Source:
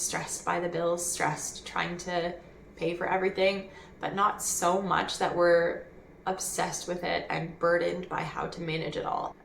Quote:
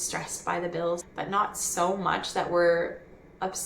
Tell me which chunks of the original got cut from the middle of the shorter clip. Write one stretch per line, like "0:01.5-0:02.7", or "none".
0:01.1-0:03.9